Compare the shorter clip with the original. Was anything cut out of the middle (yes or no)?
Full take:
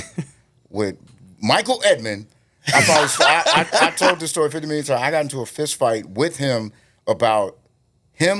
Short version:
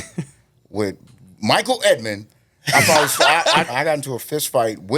yes